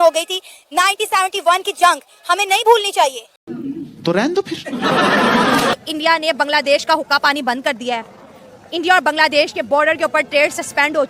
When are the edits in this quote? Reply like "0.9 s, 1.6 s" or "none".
5.7 s